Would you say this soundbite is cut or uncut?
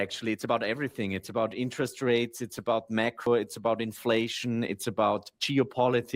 uncut